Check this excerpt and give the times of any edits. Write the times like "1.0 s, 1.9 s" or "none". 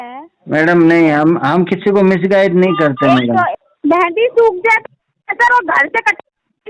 3.5 s